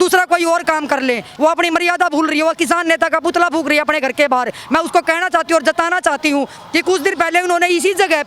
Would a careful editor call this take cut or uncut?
cut